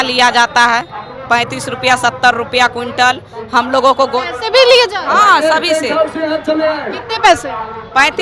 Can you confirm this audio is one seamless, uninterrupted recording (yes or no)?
yes